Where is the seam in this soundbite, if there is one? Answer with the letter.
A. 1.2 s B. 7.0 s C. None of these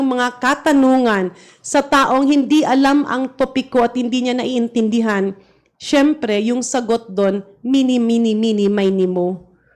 C